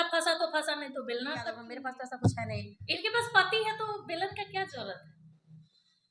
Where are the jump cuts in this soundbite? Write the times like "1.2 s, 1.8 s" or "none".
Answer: 1.7 s